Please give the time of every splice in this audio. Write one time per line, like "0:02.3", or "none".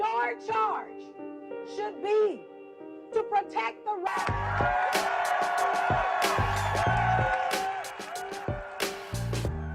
none